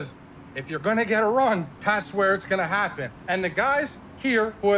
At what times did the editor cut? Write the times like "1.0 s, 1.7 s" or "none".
1.7 s, 3.1 s